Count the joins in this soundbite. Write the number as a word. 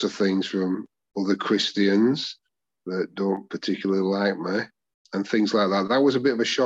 zero